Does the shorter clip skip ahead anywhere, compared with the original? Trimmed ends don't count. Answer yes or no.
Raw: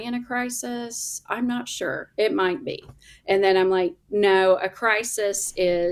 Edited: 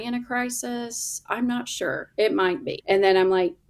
yes